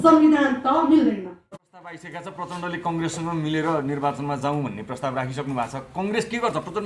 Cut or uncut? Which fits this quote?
cut